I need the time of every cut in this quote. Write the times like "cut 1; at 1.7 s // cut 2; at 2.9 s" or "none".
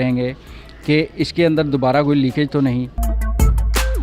cut 1; at 3.0 s